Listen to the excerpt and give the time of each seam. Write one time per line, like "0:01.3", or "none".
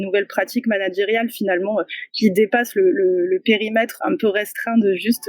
0:03.9